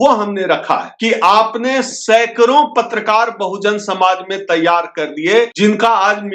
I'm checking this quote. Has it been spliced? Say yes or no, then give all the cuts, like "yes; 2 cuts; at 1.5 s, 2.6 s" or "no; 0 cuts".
yes; 2 cuts; at 0.9 s, 5.5 s